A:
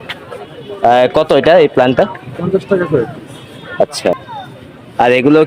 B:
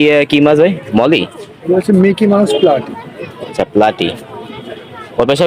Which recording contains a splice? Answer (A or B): A